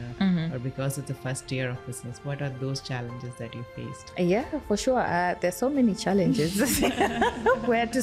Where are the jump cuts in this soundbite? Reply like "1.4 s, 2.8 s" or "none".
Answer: none